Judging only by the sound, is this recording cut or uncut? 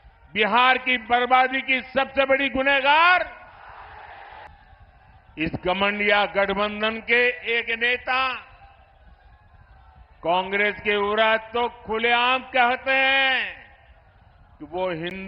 cut